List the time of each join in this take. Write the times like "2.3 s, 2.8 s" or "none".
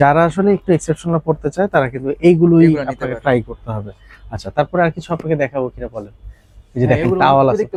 none